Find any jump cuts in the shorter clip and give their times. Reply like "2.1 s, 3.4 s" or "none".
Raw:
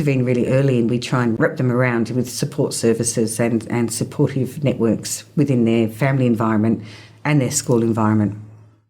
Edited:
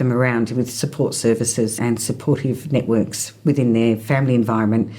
1.7 s